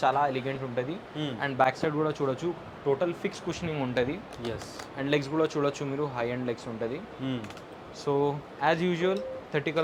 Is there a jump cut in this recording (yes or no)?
no